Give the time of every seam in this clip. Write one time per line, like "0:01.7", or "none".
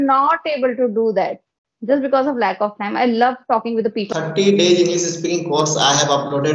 0:04.0